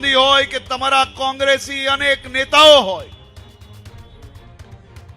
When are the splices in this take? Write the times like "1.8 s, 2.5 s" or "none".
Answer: none